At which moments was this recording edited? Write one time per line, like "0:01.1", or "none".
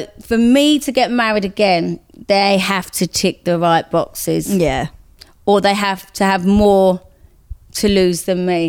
none